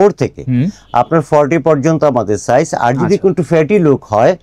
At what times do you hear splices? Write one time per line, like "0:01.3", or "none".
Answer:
none